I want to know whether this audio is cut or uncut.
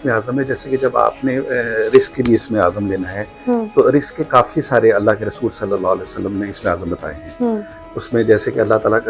uncut